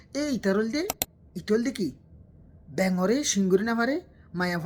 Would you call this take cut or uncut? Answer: uncut